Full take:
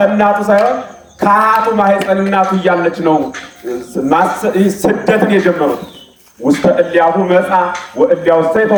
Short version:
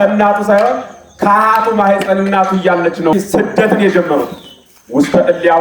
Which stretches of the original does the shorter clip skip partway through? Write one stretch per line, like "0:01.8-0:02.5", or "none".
0:03.1-0:04.6